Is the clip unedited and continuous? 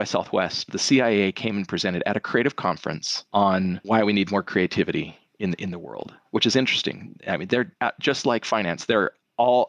yes; 0 cuts

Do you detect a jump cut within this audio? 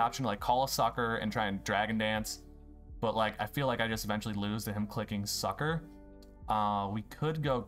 no; 0 cuts

